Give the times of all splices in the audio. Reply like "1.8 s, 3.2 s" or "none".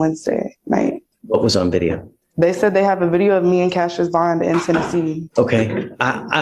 1.1 s, 5.2 s